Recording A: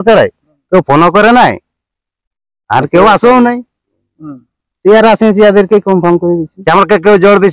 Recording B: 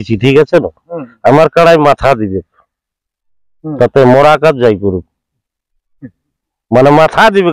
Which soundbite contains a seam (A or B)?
A